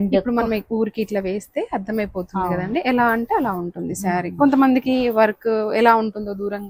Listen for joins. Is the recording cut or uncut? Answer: uncut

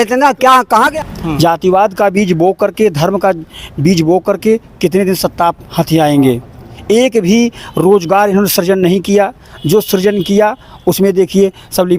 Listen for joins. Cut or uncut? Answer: cut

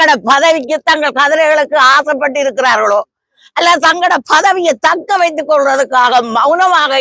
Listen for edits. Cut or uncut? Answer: uncut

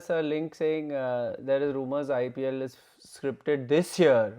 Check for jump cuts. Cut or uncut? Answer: uncut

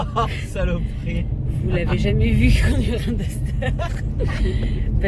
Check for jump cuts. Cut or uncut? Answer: uncut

